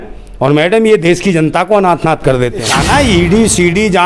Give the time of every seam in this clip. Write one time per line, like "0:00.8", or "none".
0:02.7